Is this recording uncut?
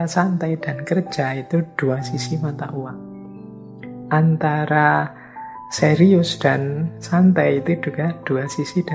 yes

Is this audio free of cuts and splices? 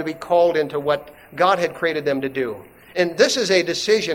no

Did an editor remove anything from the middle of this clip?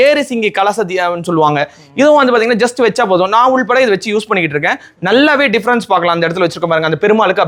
no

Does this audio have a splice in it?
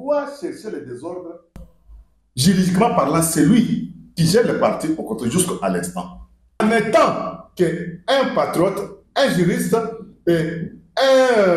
yes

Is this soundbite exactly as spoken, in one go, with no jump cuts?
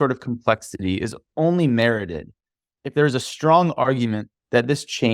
no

